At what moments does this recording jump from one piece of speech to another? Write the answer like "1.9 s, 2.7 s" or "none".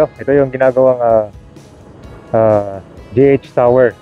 none